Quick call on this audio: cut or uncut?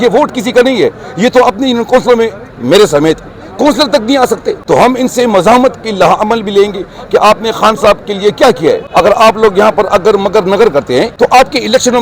cut